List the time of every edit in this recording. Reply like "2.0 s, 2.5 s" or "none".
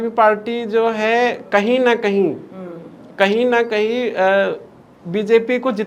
none

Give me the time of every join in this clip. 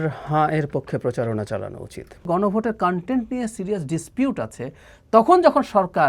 2.3 s

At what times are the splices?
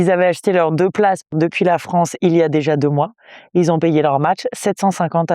1.3 s

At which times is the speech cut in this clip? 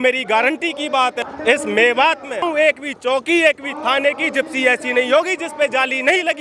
1.3 s, 2.4 s

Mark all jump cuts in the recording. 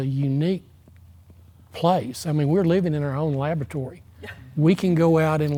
none

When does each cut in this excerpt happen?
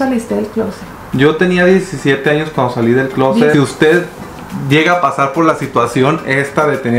3.5 s

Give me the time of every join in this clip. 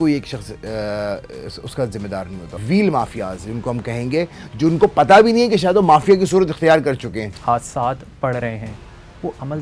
2.6 s, 7.2 s

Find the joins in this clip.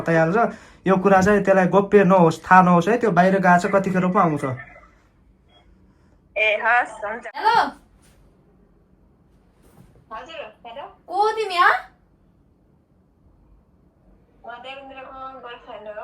7.3 s

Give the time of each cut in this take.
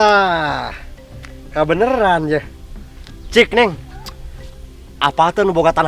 none

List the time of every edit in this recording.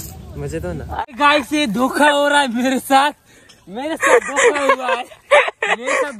1.0 s

